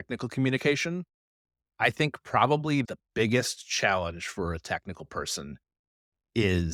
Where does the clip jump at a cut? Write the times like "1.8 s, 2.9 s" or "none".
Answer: none